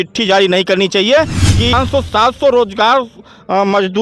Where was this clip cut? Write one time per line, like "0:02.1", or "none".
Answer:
0:01.7